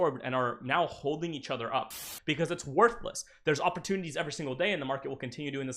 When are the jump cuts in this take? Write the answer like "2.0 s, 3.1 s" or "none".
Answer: 2.0 s